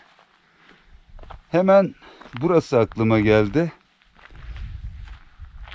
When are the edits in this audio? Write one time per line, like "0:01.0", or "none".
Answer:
none